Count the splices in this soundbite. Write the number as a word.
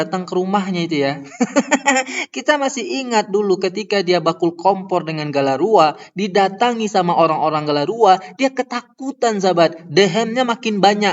zero